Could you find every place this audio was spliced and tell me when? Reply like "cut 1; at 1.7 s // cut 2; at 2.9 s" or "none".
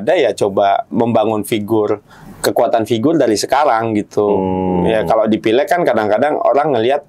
none